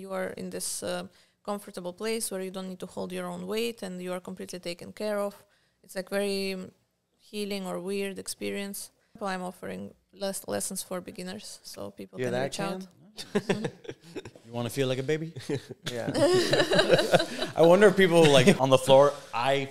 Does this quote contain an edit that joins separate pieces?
yes; 2 cuts; at 9.2 s, 18.6 s

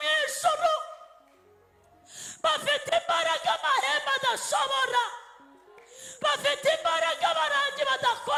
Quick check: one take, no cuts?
yes; 0 cuts

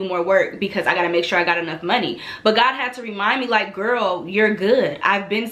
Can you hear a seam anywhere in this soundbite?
no; 0 cuts

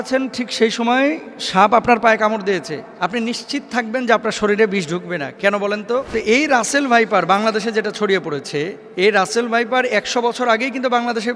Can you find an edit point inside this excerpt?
yes; 3 cuts; at 2.8 s, 6.1 s, 8.8 s

